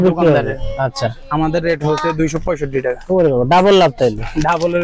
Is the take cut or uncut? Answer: uncut